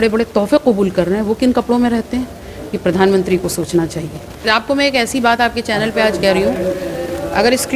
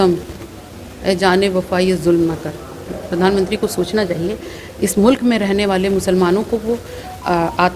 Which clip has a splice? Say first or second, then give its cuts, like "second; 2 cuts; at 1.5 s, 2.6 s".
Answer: first; 1 cut; at 4.4 s